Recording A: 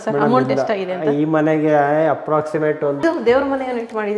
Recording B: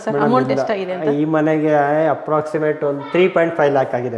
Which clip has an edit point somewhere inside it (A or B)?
A